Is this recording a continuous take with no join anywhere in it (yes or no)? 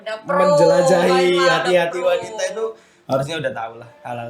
yes